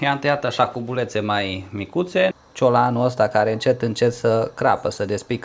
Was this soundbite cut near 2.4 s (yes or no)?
yes